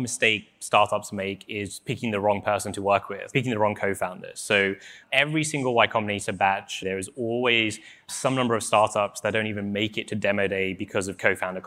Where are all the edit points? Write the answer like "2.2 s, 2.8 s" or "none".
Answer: 3.2 s

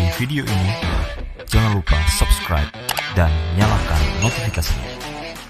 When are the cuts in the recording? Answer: none

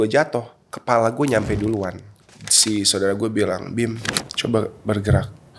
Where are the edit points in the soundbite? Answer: 2.0 s

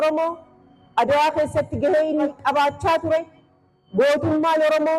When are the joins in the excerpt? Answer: 2.3 s

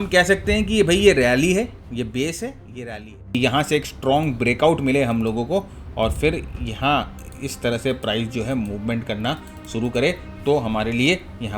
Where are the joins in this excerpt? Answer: 3.3 s

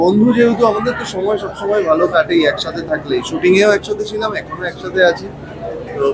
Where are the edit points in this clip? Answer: none

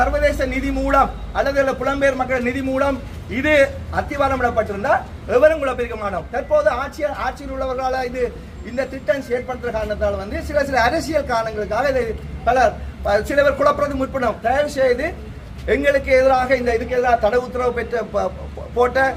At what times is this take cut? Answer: none

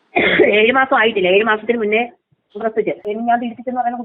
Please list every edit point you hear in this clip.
3.1 s

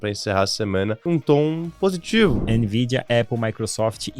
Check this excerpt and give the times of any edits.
1.0 s, 2.4 s

